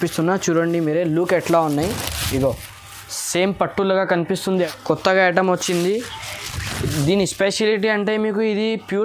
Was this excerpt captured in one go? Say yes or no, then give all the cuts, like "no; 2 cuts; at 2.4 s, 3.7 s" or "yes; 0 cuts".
no; 1 cut; at 4.7 s